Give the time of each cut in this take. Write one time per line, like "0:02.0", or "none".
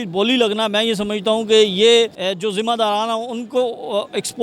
0:02.2